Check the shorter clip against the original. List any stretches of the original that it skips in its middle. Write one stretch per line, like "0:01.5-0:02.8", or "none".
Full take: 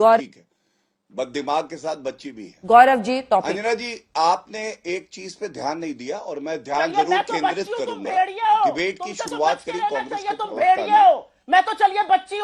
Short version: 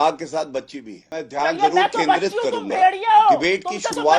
0:02.6-0:06.4